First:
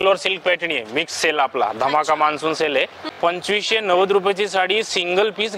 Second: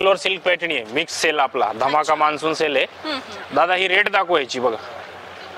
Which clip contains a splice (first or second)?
first